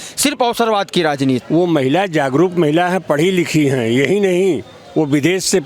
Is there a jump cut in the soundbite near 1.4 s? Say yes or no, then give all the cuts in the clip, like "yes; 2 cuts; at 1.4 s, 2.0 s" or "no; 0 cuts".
yes; 1 cut; at 1.4 s